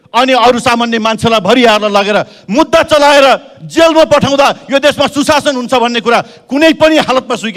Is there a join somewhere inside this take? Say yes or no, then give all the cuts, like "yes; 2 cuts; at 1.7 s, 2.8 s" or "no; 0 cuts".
no; 0 cuts